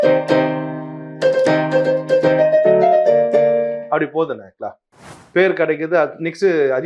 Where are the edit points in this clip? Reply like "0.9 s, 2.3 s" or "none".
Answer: 5.2 s